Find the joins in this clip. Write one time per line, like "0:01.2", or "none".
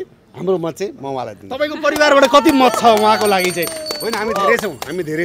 none